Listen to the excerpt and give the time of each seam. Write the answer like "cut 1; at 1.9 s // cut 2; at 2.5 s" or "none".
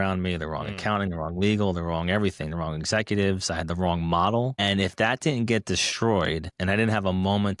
cut 1; at 4.6 s // cut 2; at 6.5 s